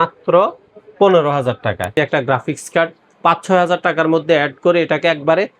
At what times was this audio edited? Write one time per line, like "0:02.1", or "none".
0:01.9